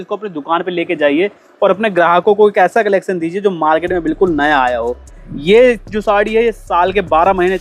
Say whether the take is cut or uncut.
uncut